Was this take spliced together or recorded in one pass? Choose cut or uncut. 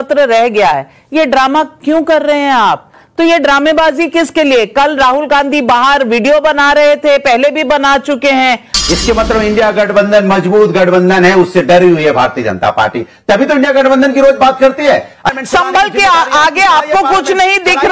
cut